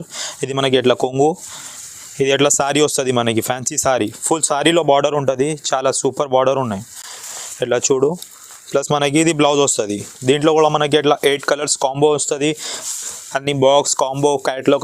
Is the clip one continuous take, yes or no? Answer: yes